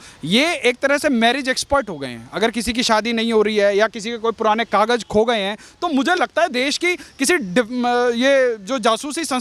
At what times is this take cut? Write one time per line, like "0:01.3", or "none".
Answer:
none